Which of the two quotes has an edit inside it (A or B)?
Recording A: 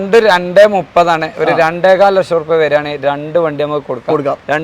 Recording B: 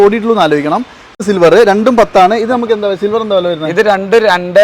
B